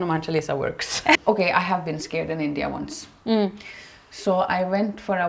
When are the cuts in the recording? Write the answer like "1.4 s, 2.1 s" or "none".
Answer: 1.2 s